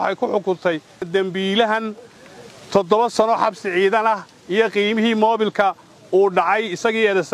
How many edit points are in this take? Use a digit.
1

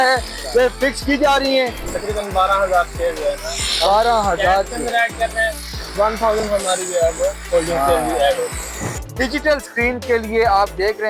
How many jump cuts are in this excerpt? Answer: 2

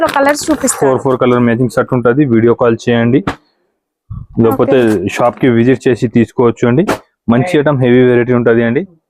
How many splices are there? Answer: 0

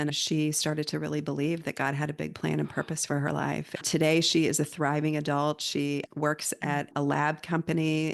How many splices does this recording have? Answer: 0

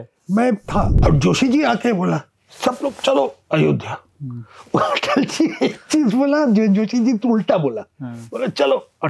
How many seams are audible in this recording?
1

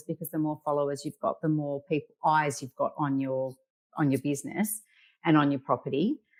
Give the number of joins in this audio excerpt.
0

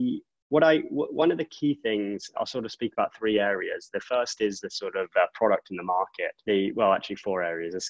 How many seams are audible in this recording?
2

